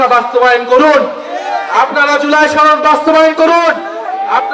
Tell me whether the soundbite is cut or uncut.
uncut